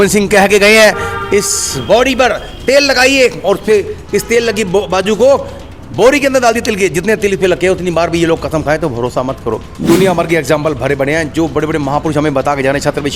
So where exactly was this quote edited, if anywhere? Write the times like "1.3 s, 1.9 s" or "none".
9.7 s